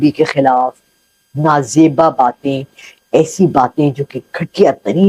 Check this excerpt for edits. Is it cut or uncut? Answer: uncut